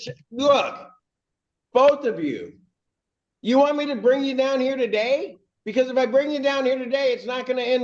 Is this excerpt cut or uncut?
uncut